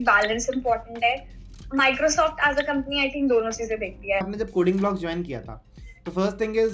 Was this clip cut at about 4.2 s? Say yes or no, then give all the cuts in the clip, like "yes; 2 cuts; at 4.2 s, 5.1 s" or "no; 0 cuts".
yes; 1 cut; at 4.2 s